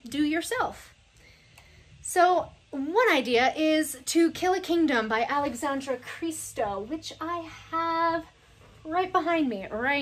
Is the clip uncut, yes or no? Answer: yes